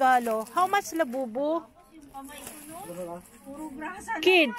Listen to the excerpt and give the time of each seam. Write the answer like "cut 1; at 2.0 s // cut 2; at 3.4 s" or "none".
none